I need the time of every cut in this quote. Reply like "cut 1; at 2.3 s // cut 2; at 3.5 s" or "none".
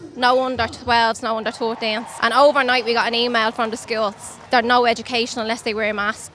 cut 1; at 2.1 s // cut 2; at 4.3 s